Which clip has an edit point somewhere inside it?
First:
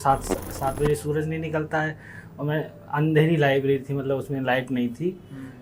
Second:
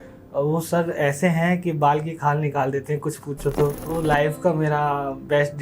second; 1 cut; at 3.8 s

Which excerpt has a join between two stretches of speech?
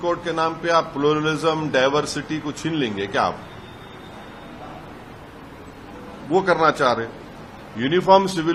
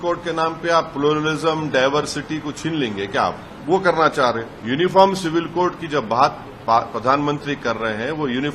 second; 2 cuts; at 3.5 s, 4.5 s

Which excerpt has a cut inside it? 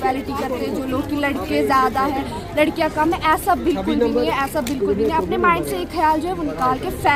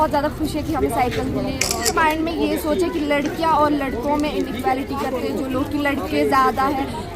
second; 1 cut; at 1.8 s

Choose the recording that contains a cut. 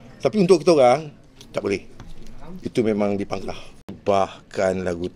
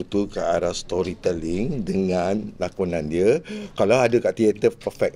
first; 1 cut; at 4.0 s

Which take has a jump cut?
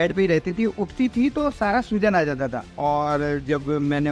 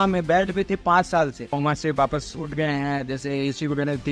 second; 1 cut; at 1.5 s

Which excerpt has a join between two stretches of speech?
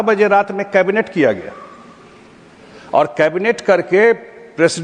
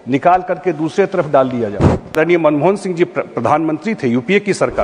second; 1 cut; at 2.2 s

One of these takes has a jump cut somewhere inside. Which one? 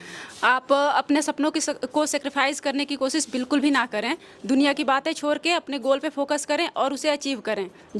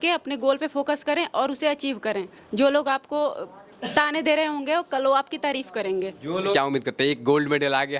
second; 1 cut; at 6.5 s

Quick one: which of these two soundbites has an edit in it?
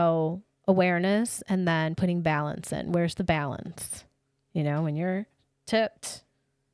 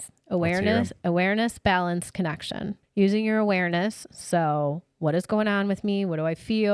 second; 1 cut; at 2.8 s

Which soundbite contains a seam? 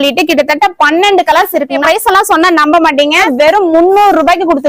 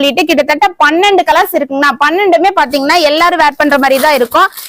first; 2 cuts; at 1.8 s, 3.3 s

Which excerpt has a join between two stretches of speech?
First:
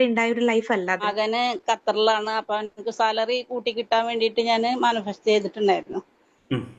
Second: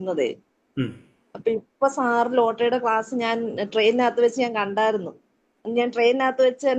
first; 1 cut; at 1.1 s

